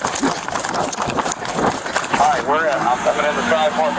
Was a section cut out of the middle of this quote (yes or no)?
yes